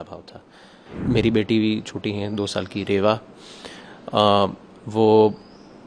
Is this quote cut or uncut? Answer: cut